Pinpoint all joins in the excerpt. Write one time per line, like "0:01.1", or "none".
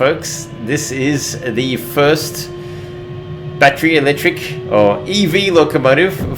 none